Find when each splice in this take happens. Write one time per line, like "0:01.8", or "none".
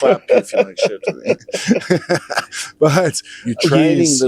0:03.3